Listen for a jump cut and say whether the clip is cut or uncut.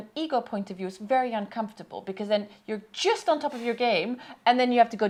uncut